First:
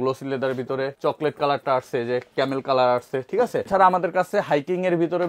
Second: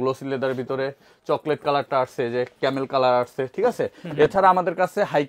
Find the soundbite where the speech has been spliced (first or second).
first